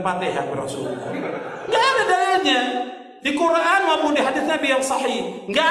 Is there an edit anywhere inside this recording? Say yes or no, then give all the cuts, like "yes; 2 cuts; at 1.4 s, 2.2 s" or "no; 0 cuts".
yes; 1 cut; at 1.5 s